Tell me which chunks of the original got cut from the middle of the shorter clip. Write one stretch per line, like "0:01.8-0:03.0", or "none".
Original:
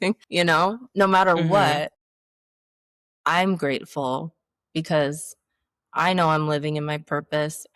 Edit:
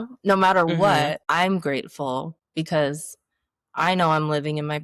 0:01.9-0:03.2
0:04.4-0:04.6